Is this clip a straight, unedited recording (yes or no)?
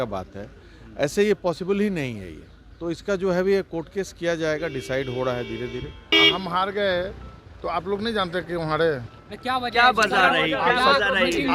no